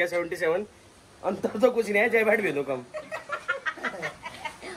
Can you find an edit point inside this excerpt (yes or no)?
no